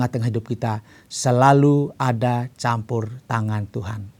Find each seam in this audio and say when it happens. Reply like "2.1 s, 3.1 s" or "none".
none